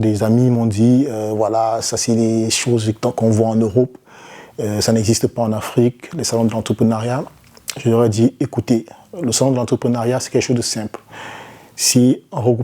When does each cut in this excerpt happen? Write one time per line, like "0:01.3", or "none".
none